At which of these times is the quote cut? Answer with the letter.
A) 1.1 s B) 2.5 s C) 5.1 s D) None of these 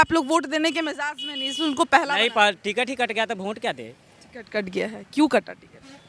D